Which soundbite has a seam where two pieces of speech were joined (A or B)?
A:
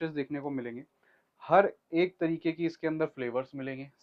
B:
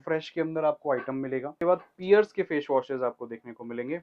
B